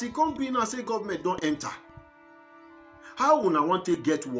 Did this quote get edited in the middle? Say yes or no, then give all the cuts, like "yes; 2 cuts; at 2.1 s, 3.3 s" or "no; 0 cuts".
yes; 2 cuts; at 1.8 s, 3.1 s